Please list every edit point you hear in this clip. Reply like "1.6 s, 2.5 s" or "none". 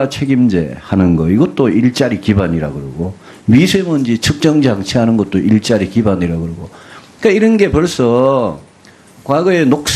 2.1 s